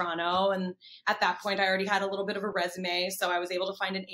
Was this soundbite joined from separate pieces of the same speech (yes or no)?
no